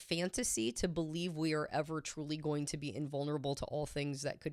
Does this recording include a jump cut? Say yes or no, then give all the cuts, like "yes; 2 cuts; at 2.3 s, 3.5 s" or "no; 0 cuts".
no; 0 cuts